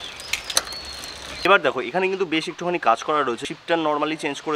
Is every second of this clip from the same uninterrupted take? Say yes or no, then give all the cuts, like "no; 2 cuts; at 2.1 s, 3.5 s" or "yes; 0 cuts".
no; 1 cut; at 1.4 s